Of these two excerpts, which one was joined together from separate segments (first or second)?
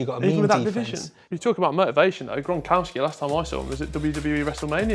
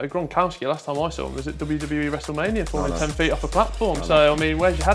first